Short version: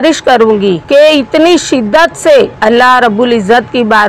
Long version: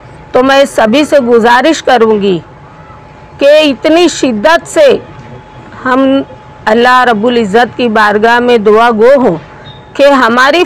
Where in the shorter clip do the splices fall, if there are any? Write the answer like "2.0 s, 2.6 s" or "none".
0.8 s, 2.5 s